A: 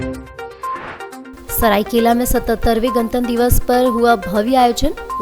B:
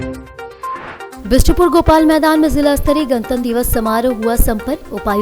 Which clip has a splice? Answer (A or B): A